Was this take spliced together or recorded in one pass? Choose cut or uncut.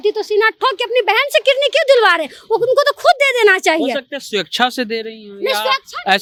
uncut